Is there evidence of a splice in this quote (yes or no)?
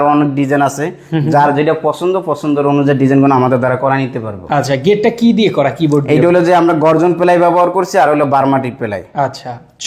no